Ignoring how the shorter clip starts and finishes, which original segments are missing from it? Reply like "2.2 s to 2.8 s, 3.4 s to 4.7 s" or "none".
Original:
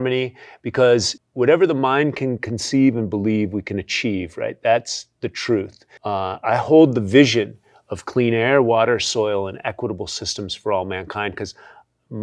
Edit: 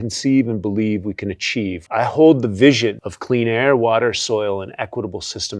4.3 s to 6.4 s, 7.6 s to 7.9 s